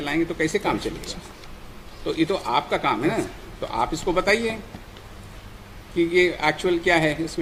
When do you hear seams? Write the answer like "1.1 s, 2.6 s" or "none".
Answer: none